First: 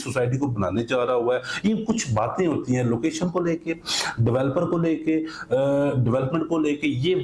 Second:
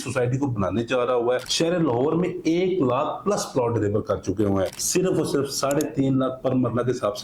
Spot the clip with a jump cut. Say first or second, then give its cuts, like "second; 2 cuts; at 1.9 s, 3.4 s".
second; 2 cuts; at 1.5 s, 4.8 s